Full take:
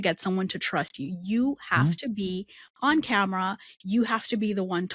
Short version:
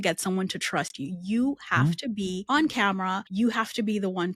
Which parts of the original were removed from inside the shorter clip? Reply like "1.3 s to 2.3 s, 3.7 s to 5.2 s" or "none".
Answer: 2.4 s to 2.7 s, 3.6 s to 3.8 s